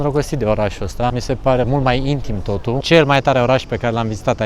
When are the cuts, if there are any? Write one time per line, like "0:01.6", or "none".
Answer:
0:01.5
0:02.8